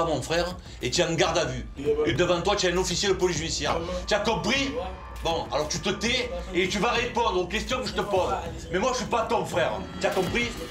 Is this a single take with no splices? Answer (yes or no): yes